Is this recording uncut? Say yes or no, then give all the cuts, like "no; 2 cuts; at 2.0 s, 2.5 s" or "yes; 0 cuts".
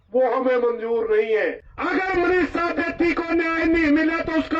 no; 1 cut; at 1.7 s